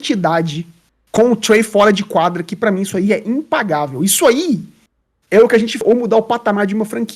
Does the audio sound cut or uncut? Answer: cut